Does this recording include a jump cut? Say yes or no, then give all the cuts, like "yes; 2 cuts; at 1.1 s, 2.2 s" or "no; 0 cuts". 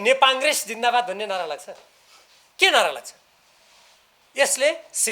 no; 0 cuts